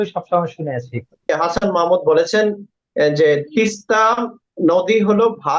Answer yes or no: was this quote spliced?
yes